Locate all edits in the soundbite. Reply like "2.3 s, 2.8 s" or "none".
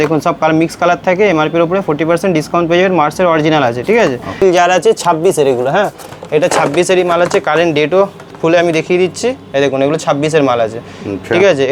4.4 s